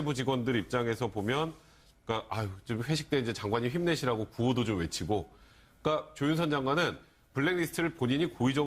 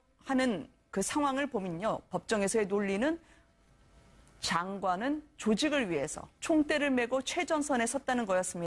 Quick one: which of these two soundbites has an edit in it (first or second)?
first